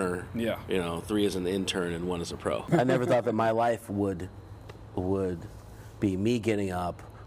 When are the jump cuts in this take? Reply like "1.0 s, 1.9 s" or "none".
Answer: 2.7 s

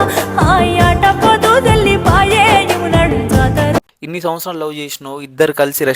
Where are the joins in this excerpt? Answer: 4.0 s

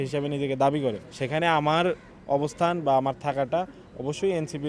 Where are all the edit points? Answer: 1.1 s

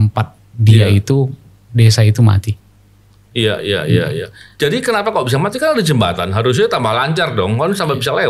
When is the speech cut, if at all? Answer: none

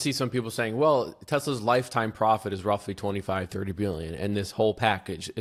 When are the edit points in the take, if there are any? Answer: none

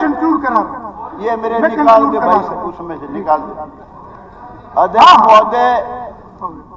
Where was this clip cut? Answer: none

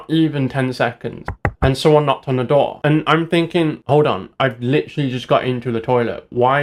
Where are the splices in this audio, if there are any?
none

